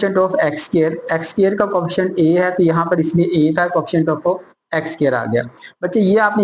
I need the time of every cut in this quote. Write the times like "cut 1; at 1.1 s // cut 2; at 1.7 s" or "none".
none